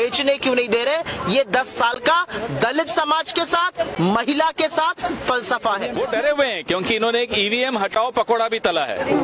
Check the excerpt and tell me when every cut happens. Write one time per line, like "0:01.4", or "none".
0:06.0